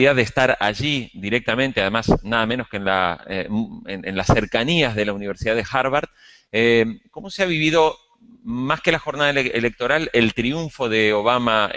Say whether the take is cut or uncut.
cut